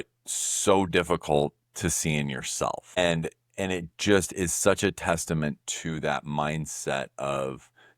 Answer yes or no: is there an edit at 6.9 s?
no